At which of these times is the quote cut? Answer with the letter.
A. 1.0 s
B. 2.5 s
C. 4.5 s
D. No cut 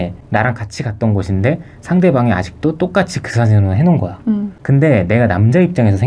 C